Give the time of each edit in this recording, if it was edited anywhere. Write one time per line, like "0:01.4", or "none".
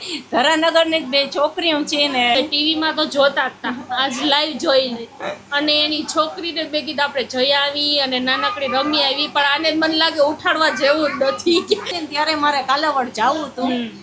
0:02.3
0:12.0

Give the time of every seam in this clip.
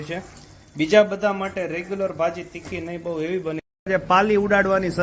0:03.9

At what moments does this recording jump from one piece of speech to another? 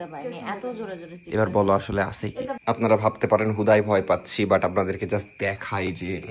0:02.6

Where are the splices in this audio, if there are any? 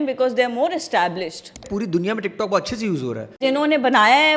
0:01.6
0:03.4

